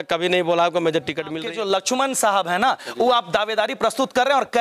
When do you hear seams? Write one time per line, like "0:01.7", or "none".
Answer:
0:01.4

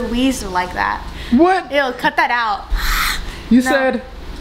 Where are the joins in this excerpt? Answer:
none

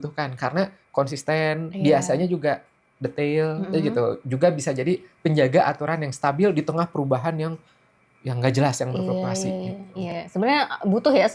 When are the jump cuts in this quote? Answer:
none

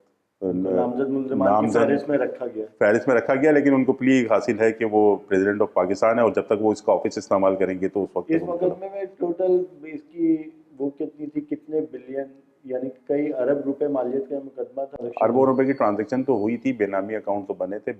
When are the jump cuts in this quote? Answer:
0:15.0

